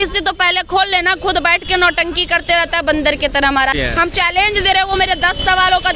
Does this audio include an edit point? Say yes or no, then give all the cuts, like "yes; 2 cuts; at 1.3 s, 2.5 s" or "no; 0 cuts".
yes; 1 cut; at 3.8 s